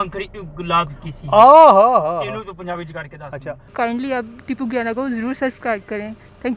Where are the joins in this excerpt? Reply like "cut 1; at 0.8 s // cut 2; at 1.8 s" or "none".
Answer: cut 1; at 3.7 s